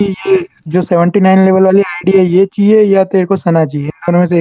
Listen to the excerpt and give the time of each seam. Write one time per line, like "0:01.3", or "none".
none